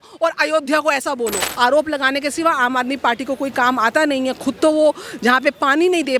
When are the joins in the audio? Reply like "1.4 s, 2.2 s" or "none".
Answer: 1.4 s